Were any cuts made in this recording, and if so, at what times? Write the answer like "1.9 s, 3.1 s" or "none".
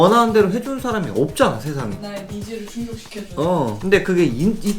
2.0 s, 3.8 s